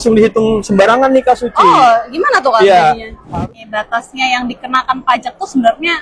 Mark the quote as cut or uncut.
cut